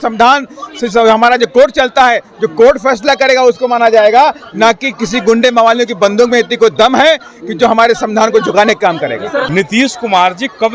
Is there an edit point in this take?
yes; 1 cut; at 9.5 s

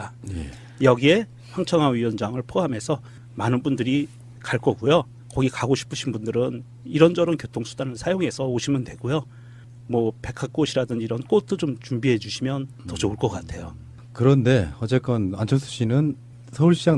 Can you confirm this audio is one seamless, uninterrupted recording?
yes; 0 cuts

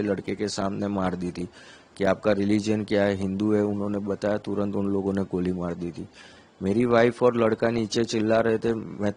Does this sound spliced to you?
no; 0 cuts

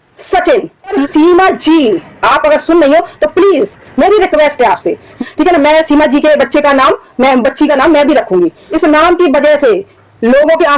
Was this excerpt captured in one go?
no; 3 cuts; at 1.0 s, 5.1 s, 8.6 s

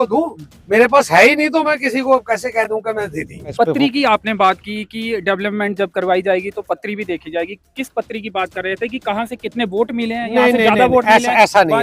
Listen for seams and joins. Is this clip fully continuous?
no; 1 cut; at 3.5 s

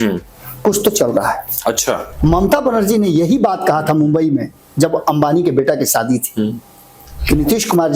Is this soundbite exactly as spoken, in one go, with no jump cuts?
no; 1 cut; at 2.1 s

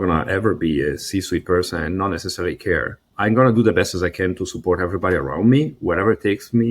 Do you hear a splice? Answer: yes; 1 cut; at 3.0 s

